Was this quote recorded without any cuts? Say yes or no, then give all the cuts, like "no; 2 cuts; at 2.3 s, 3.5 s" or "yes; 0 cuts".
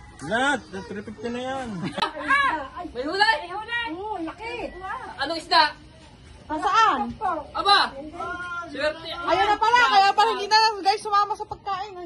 no; 1 cut; at 2.0 s